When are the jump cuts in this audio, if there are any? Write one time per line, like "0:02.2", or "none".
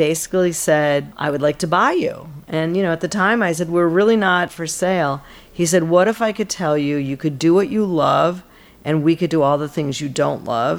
0:01.1
0:04.5

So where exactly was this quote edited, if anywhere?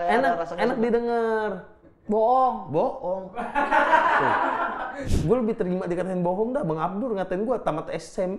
0:04.9

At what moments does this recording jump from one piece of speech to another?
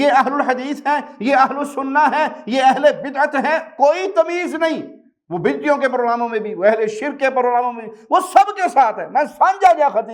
none

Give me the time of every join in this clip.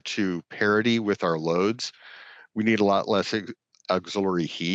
none

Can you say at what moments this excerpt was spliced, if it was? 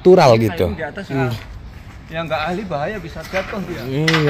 0:01.2

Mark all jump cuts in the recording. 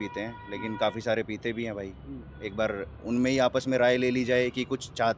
none

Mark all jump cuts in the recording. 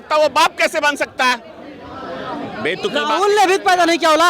none

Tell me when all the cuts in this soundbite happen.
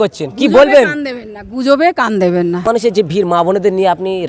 0:02.6

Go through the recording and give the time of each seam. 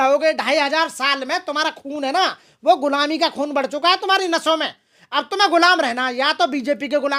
none

